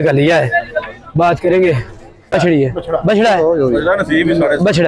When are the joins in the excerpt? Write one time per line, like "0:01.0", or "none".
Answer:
0:02.3